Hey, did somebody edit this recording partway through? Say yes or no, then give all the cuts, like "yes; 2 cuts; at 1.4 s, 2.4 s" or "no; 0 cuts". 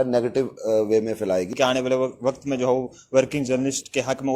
yes; 1 cut; at 1.5 s